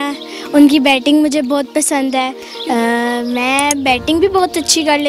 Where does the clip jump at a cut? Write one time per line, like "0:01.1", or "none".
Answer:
0:02.4

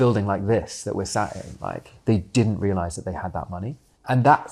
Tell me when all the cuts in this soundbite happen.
0:01.9

